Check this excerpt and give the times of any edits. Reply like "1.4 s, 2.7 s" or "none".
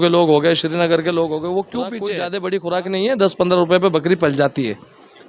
2.1 s

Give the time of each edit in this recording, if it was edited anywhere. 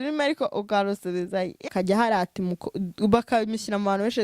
1.7 s

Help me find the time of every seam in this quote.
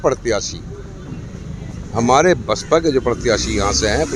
none

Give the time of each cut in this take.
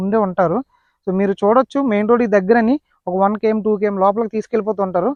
none

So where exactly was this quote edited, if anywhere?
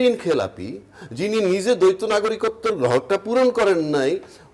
none

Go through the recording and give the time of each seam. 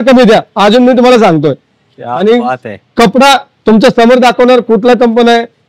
none

